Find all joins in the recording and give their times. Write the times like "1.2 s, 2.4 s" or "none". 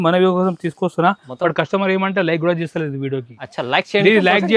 none

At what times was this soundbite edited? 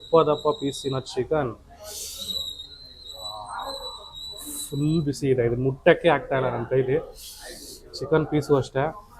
none

